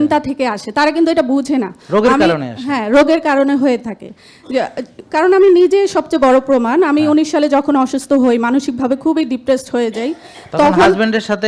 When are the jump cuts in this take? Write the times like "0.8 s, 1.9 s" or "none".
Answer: none